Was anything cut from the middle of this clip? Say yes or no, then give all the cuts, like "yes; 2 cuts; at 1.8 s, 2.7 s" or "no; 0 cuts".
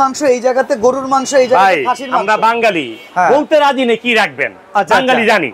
no; 0 cuts